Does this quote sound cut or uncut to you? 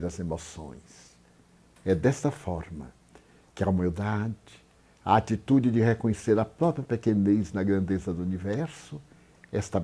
uncut